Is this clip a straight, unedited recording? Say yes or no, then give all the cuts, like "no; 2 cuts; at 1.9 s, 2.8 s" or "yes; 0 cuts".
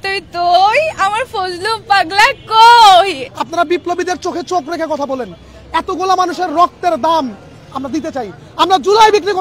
no; 1 cut; at 3.2 s